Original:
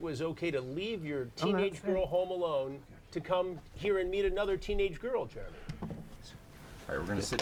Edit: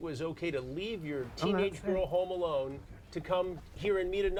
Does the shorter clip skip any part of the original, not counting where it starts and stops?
no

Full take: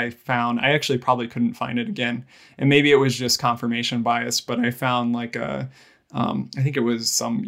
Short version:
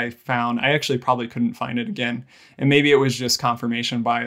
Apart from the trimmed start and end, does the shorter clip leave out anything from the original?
no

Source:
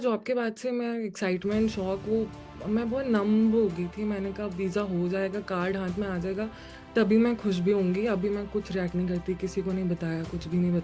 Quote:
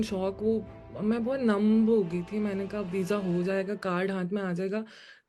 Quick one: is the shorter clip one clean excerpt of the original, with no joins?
yes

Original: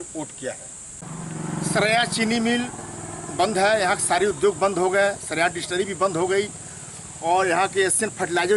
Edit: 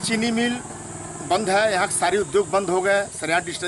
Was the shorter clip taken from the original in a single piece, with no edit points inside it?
yes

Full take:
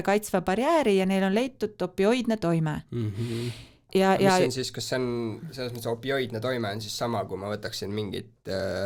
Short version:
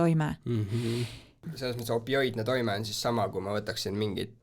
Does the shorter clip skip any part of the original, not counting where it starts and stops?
yes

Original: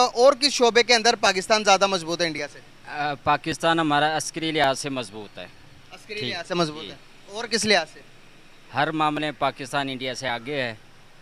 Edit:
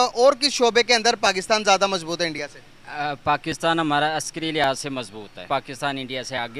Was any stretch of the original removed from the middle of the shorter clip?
yes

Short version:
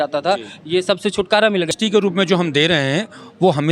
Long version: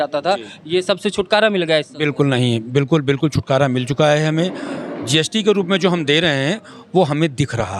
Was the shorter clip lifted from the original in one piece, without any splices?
no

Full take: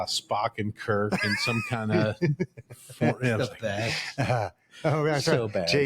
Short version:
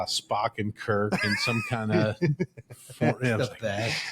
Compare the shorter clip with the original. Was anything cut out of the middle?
no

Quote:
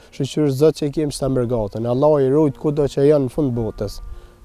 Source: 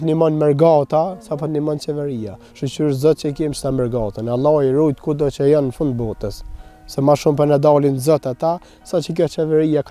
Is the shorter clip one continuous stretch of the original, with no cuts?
yes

